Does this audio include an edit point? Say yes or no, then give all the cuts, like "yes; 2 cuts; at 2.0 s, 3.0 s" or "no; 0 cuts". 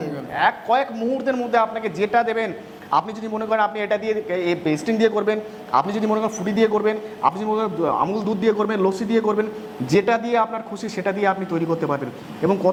no; 0 cuts